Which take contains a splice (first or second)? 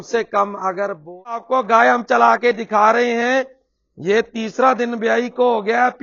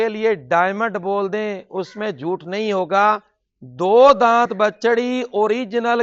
first